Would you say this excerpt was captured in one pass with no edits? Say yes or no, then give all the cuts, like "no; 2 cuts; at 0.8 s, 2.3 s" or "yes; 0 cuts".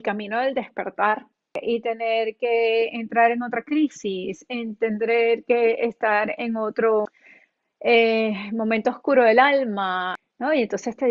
no; 3 cuts; at 1.6 s, 7.2 s, 10.2 s